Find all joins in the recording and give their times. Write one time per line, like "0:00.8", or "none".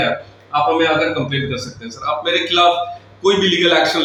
none